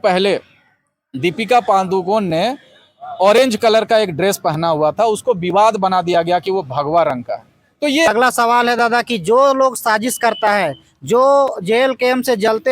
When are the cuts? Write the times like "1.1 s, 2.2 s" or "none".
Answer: 8.1 s